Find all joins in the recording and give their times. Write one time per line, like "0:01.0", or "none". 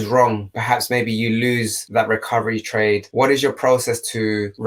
none

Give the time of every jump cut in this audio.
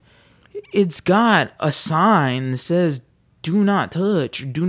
none

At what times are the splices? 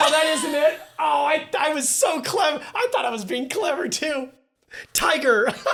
none

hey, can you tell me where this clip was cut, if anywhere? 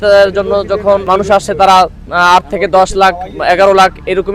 0:01.1

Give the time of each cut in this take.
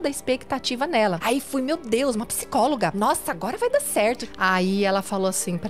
0:01.2
0:02.9
0:04.2

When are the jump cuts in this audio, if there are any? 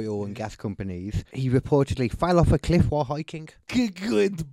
0:01.3
0:03.5

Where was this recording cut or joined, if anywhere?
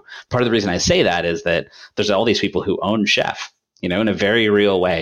none

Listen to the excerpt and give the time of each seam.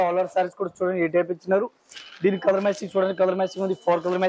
none

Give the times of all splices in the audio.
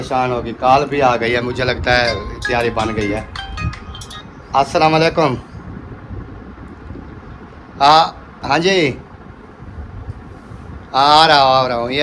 none

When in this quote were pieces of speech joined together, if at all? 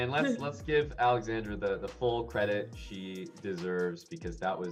none

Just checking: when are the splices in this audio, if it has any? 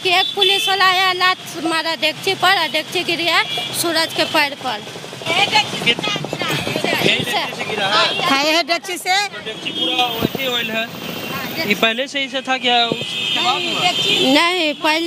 none

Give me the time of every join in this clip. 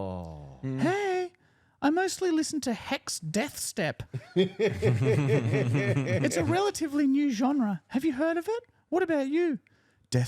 none

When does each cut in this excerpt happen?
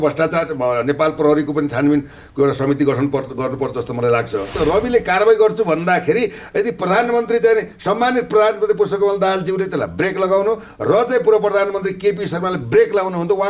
0:04.6

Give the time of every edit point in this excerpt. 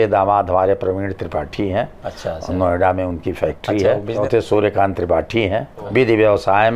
0:04.2
0:05.9

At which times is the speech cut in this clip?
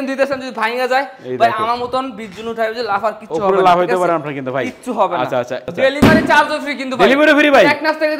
0:05.6

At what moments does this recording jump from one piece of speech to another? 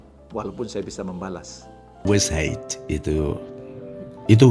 0:02.1
0:03.5

